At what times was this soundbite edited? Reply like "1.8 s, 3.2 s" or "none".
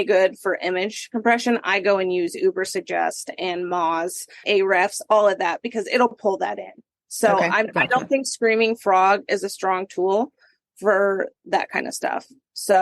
4.4 s, 11.4 s